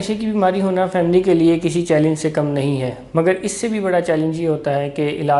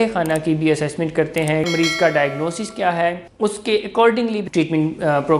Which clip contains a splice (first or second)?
second